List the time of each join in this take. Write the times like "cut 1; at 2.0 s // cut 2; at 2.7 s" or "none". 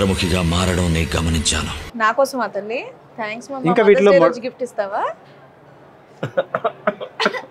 cut 1; at 1.8 s